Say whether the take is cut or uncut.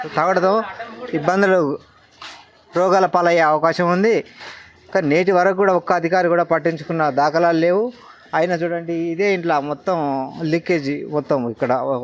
uncut